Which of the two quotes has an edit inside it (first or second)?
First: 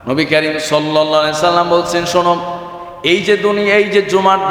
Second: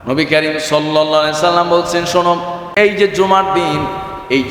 second